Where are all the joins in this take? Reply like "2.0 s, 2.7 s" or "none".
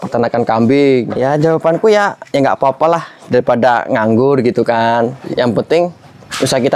1.3 s, 5.2 s

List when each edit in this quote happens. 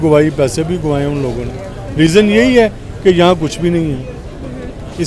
none

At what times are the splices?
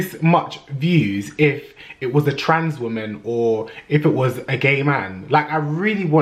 none

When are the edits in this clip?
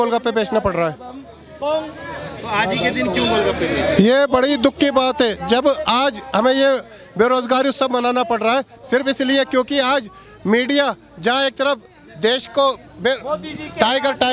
none

